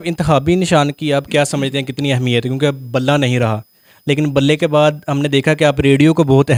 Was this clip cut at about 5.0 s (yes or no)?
no